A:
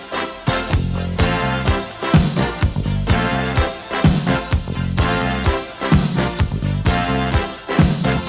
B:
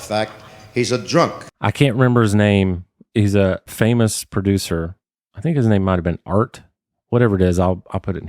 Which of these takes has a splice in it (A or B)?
B